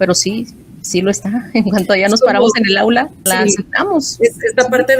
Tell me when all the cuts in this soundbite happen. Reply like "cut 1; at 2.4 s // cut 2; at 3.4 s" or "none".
cut 1; at 3.3 s